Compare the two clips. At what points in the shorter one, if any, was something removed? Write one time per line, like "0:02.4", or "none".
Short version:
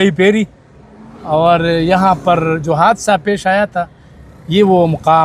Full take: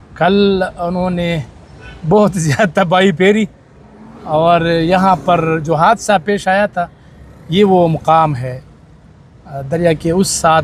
none